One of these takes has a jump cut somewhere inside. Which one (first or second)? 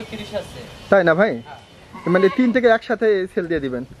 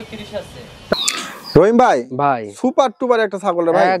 second